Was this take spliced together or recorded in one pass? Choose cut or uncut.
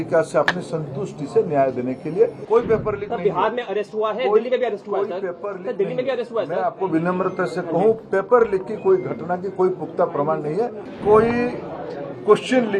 cut